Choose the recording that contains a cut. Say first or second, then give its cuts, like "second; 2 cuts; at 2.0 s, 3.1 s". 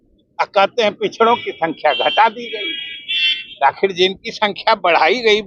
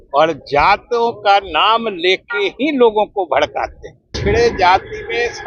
second; 1 cut; at 4.2 s